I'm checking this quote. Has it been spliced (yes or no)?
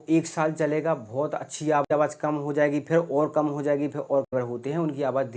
yes